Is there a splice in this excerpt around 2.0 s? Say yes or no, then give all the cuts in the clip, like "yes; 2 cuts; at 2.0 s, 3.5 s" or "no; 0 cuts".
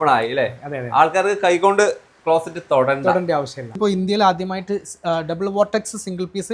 no; 1 cut; at 3.8 s